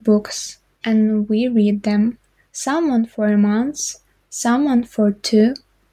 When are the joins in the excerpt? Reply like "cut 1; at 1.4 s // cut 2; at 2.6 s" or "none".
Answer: none

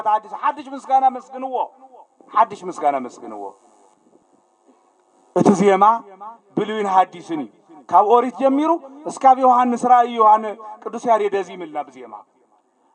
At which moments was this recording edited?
cut 1; at 4.2 s

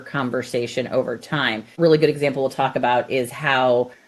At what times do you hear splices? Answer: cut 1; at 1.8 s

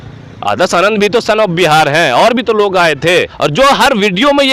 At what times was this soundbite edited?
cut 1; at 3.2 s

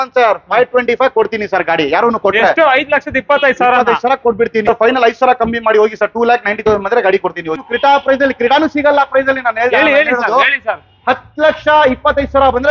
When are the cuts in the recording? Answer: cut 1; at 4.7 s // cut 2; at 7.6 s

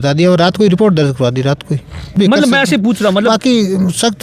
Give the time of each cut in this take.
cut 1; at 2.1 s

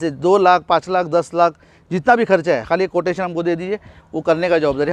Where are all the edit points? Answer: none

